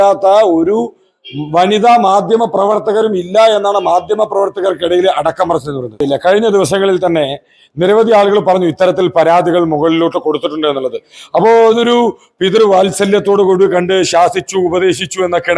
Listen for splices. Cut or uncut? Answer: cut